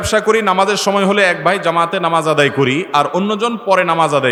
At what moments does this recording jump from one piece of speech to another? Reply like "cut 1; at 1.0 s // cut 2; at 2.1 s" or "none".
none